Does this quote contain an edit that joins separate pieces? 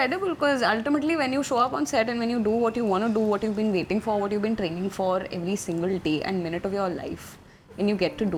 no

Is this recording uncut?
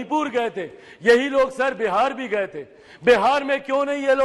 yes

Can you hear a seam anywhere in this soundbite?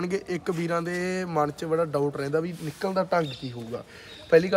no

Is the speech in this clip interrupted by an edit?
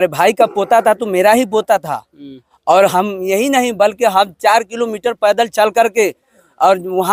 no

